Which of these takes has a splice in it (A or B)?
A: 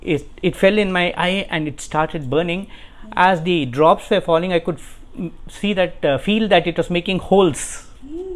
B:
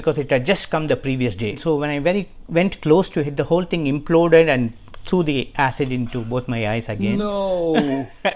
B